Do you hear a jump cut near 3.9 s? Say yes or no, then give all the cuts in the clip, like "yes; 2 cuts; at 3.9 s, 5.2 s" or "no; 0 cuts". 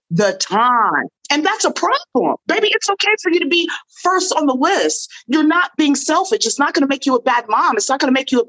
no; 2 cuts; at 1.0 s, 2.4 s